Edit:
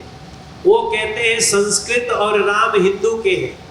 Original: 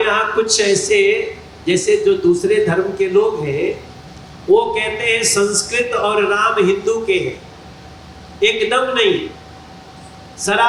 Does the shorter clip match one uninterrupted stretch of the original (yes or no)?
yes